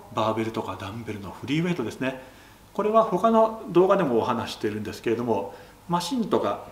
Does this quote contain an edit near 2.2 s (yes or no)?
no